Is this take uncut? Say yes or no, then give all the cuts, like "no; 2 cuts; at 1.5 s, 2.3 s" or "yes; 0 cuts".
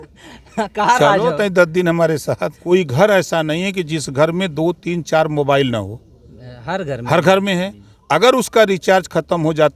no; 1 cut; at 2.6 s